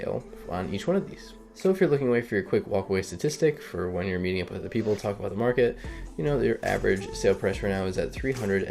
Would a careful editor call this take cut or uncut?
cut